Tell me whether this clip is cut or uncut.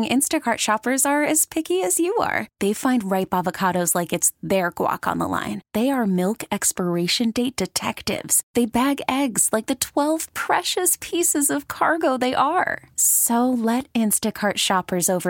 uncut